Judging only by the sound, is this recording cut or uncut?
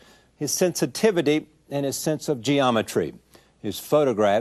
uncut